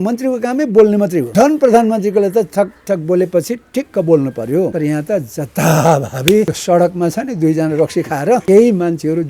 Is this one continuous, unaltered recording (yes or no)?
no